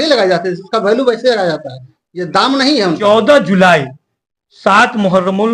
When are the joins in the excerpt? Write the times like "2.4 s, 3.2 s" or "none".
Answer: 3.0 s